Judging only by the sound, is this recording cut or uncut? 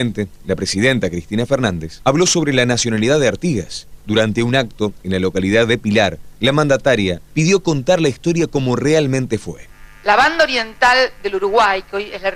uncut